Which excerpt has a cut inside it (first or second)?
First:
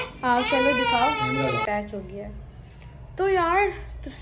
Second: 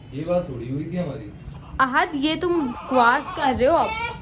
first